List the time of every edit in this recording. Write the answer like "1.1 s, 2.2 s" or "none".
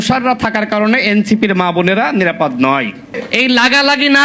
3.1 s

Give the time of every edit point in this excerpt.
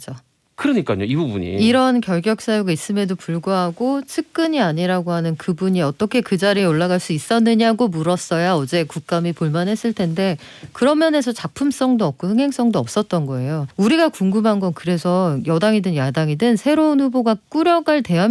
13.6 s

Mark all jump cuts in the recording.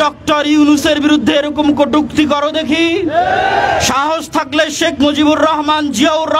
none

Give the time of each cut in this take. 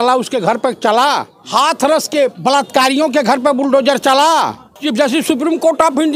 1.4 s, 4.7 s

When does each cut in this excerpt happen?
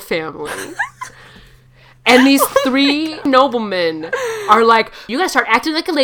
2.0 s, 3.2 s, 5.0 s

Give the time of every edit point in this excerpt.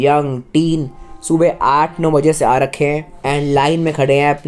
3.1 s

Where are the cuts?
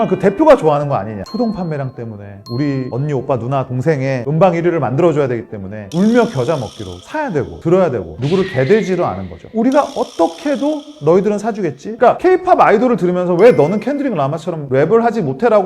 1.2 s, 8.1 s, 11.9 s

